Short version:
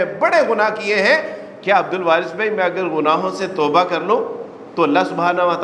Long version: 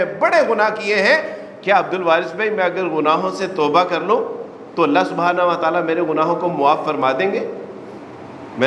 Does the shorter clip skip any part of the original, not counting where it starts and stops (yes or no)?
no